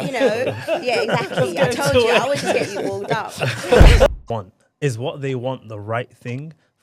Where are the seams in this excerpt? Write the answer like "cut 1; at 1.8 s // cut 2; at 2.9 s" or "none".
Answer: cut 1; at 4.1 s

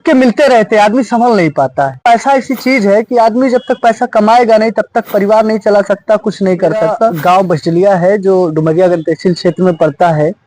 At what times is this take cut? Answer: cut 1; at 2.0 s // cut 2; at 7.2 s

